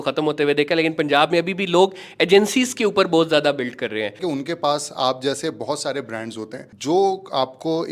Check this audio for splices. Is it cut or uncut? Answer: cut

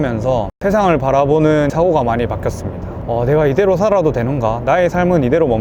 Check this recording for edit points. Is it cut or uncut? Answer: uncut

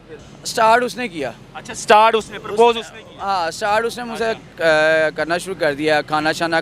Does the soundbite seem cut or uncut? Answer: uncut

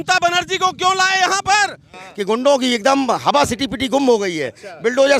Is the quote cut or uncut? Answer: cut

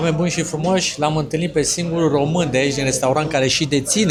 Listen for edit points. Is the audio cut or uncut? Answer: uncut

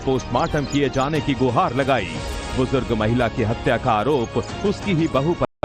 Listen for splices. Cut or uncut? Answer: uncut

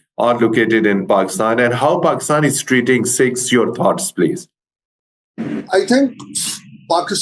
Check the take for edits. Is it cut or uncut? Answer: uncut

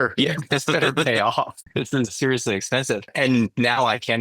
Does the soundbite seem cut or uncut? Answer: cut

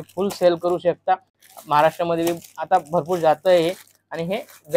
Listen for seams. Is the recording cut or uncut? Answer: uncut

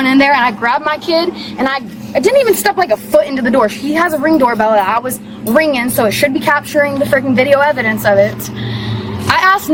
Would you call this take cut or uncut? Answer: uncut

